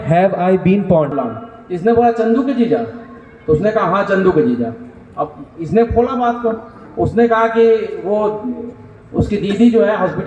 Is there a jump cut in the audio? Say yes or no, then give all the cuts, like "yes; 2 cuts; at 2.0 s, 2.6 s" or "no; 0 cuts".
yes; 1 cut; at 1.1 s